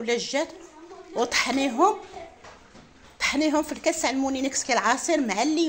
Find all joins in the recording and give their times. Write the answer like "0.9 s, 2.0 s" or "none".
none